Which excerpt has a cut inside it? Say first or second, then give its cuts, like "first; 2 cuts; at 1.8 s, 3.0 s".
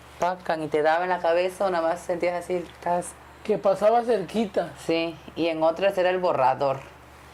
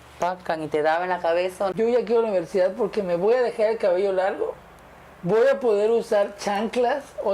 second; 1 cut; at 1.7 s